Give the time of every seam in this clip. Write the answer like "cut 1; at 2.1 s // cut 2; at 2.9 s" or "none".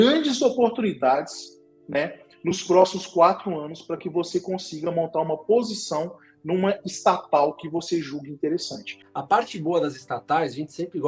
cut 1; at 9.0 s